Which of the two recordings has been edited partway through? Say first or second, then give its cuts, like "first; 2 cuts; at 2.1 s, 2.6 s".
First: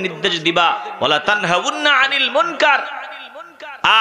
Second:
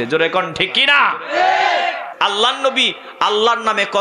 second; 1 cut; at 2.1 s